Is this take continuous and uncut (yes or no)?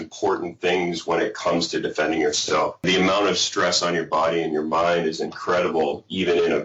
no